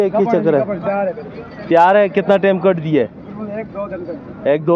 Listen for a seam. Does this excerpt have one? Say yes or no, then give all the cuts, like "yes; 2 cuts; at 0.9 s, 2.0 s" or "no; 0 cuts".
no; 0 cuts